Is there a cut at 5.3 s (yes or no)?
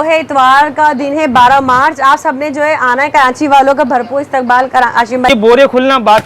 yes